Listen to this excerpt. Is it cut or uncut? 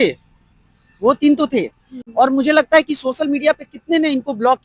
uncut